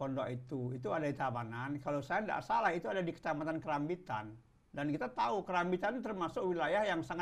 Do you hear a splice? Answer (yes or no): no